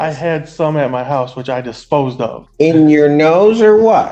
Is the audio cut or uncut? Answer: cut